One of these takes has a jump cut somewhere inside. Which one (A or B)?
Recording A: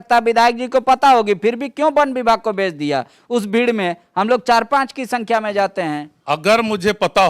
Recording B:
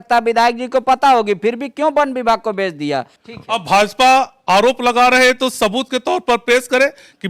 B